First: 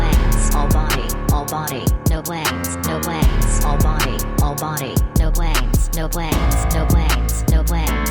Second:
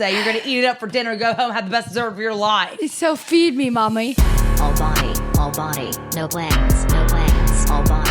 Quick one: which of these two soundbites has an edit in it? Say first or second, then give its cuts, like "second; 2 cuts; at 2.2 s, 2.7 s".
second; 1 cut; at 4.2 s